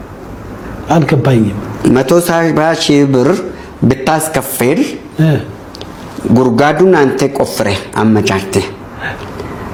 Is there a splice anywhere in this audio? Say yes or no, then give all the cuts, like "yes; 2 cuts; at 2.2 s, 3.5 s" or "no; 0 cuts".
no; 0 cuts